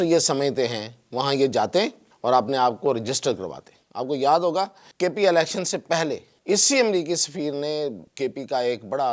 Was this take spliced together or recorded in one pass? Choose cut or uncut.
cut